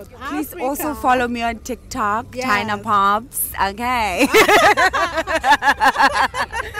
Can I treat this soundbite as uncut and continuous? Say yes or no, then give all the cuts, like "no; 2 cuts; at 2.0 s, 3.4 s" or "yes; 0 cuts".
yes; 0 cuts